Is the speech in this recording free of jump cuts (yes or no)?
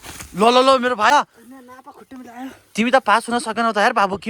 no